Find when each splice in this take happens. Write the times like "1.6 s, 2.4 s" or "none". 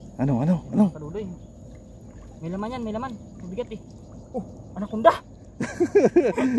none